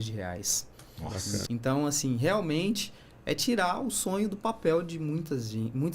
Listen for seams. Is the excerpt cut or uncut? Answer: cut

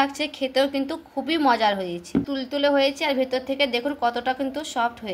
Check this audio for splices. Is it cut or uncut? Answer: cut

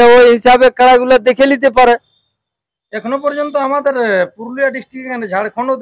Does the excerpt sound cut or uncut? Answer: uncut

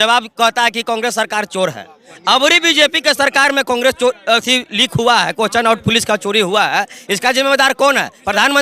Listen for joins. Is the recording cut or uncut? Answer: uncut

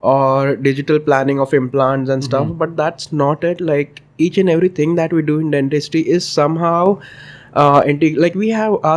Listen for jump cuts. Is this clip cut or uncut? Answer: uncut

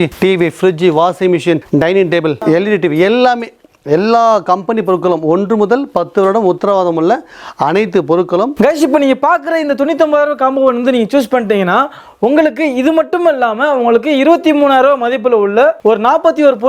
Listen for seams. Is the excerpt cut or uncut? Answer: cut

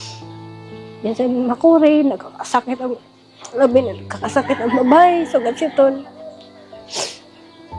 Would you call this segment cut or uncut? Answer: cut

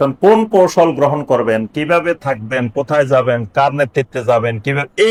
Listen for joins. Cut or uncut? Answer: uncut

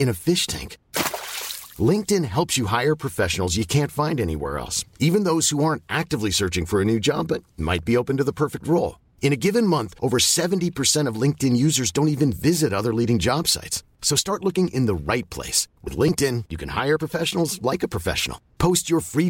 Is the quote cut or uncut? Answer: uncut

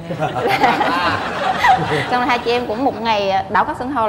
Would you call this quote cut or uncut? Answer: uncut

